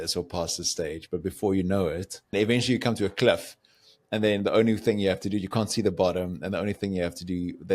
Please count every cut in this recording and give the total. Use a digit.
1